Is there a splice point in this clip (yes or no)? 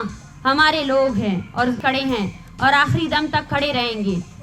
yes